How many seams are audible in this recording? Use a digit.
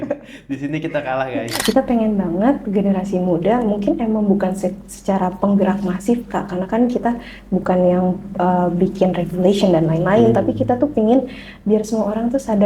1